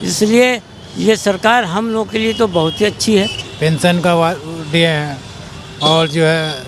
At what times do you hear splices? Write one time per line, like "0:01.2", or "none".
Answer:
0:03.4